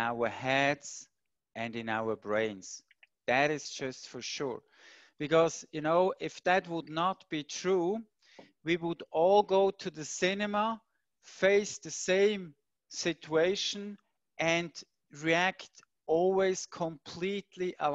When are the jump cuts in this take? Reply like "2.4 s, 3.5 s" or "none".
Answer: none